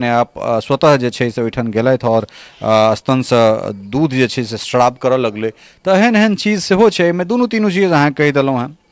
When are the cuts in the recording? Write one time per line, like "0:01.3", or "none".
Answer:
none

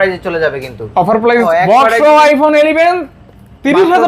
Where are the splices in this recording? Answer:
0:01.5

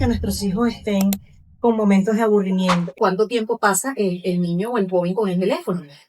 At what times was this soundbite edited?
0:02.9

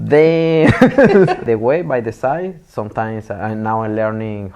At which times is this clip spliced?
0:01.4

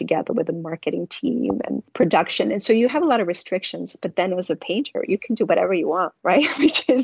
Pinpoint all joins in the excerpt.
0:01.9

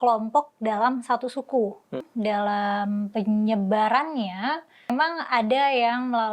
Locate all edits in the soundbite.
0:02.0
0:04.9

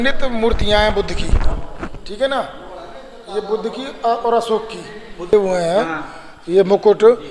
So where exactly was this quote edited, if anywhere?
0:05.3

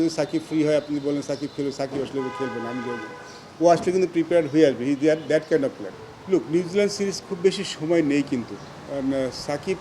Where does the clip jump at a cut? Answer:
0:05.9

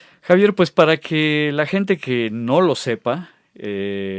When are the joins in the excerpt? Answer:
0:03.2

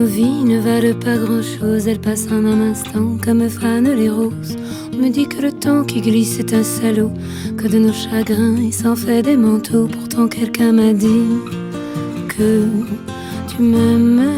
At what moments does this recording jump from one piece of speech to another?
none

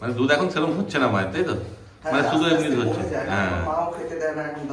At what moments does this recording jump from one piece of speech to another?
none

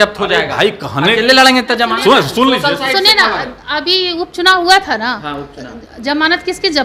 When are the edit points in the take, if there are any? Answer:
none

